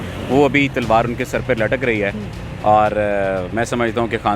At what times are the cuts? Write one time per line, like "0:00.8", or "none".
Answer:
none